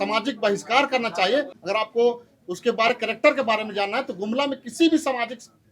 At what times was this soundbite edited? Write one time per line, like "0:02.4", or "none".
0:01.6